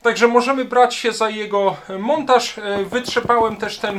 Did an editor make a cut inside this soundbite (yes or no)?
no